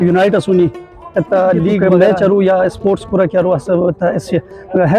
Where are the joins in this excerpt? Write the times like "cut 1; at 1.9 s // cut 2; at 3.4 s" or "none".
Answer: cut 1; at 1.8 s